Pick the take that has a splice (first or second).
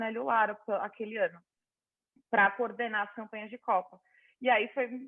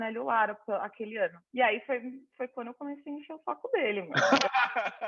second